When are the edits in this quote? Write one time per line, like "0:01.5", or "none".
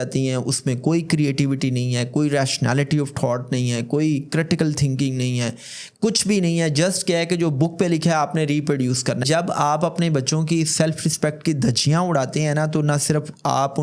0:09.2

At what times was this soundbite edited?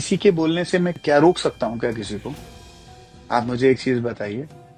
0:00.9

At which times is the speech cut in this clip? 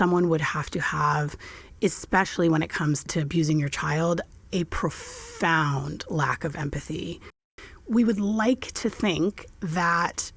0:03.1
0:07.5

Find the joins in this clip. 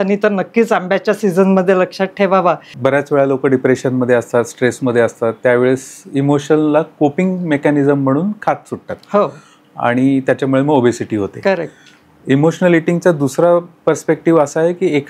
0:02.7

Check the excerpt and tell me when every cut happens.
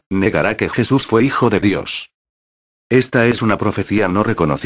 0:01.9

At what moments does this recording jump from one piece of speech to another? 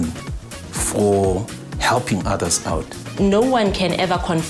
0:03.1

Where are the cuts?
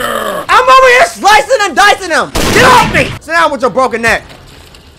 0:03.2

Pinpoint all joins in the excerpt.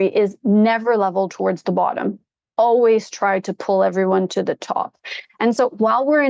none

